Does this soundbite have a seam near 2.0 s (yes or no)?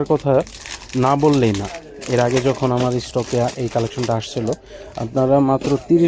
no